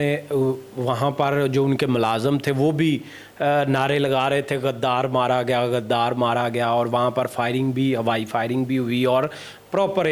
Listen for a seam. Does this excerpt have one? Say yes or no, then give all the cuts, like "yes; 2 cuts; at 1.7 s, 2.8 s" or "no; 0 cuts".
no; 0 cuts